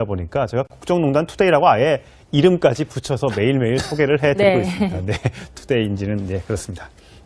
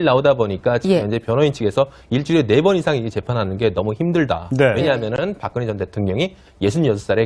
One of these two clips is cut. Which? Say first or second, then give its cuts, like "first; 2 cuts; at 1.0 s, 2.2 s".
second; 1 cut; at 2.6 s